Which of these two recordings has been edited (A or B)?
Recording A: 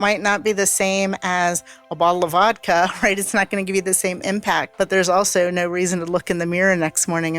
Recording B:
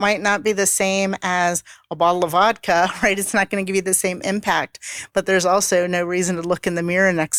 A